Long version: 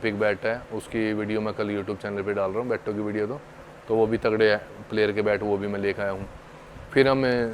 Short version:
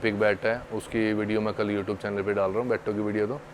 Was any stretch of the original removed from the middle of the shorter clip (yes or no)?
no